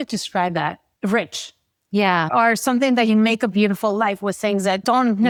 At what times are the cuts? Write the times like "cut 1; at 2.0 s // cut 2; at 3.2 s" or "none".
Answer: none